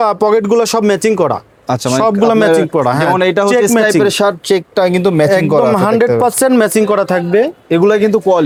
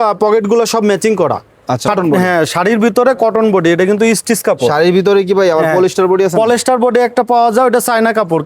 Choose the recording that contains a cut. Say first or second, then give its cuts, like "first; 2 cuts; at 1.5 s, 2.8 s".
second; 1 cut; at 1.9 s